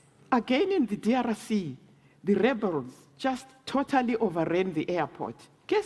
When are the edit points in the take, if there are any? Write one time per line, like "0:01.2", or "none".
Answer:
0:01.1